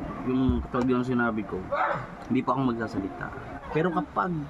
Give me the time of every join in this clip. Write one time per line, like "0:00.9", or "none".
0:03.5